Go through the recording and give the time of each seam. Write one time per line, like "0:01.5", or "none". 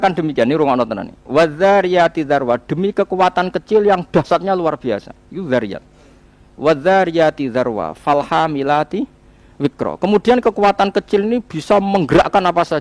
none